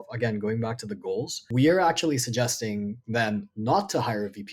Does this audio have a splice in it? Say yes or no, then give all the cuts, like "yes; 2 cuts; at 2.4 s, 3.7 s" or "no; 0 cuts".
yes; 1 cut; at 1.4 s